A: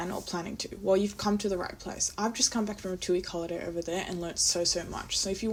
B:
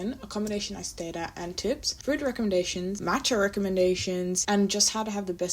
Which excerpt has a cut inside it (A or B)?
B